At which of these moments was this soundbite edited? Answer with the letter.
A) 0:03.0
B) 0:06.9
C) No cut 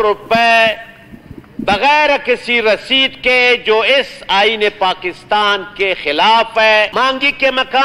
B